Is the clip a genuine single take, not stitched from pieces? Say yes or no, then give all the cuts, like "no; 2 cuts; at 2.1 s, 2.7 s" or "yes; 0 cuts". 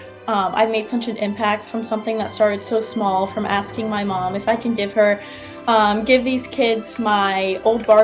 yes; 0 cuts